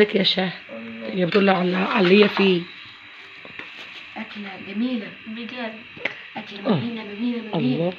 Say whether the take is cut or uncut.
uncut